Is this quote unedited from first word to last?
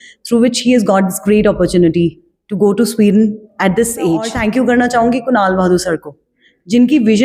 no; 1 cut; at 4.3 s

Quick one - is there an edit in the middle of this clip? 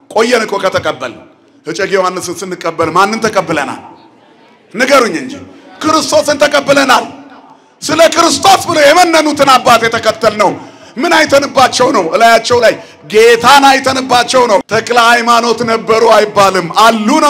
yes; 1 cut; at 14.6 s

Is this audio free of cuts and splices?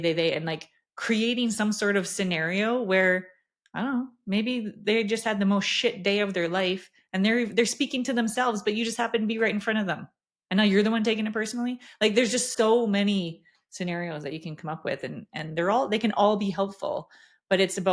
yes; 0 cuts

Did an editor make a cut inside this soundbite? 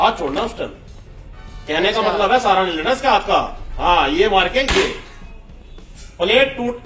no; 0 cuts

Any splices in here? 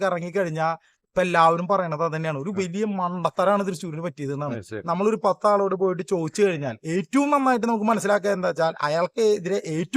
yes; 1 cut; at 4.8 s

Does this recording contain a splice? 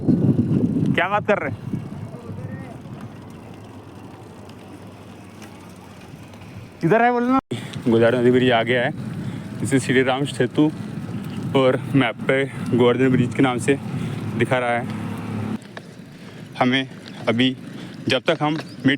yes; 2 cuts; at 7.4 s, 15.6 s

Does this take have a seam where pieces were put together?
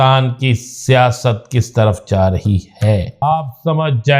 yes; 1 cut; at 3.2 s

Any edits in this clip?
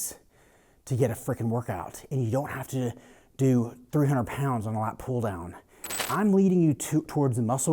yes; 1 cut; at 6.1 s

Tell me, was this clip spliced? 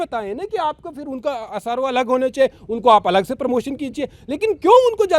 no; 0 cuts

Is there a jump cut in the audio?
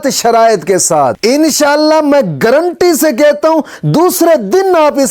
no; 0 cuts

